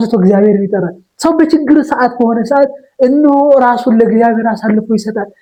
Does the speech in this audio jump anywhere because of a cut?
no; 0 cuts

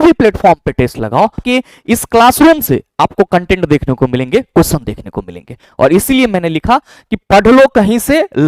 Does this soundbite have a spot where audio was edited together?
yes; 1 cut; at 1.4 s

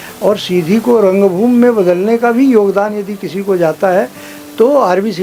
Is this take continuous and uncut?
yes; 0 cuts

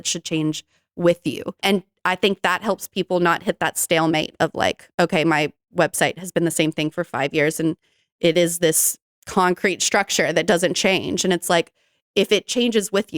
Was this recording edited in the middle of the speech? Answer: yes; 1 cut; at 1.6 s

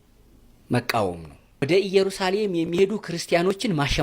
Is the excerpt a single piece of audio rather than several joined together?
no; 1 cut; at 1.6 s

